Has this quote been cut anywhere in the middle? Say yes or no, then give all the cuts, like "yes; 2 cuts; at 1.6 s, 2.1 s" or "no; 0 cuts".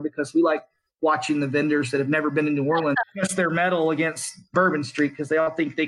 yes; 2 cuts; at 3.0 s, 4.5 s